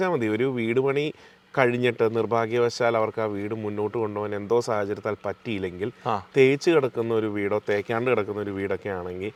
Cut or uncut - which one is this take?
uncut